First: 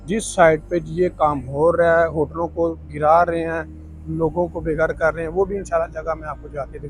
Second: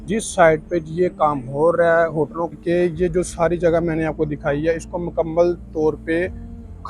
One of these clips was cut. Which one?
second; 1 cut; at 2.5 s

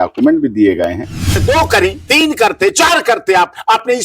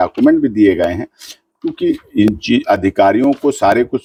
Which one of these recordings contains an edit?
first; 1 cut; at 1.3 s

